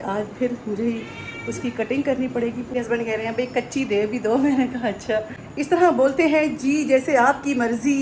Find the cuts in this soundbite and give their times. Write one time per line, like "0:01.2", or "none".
0:02.6
0:05.4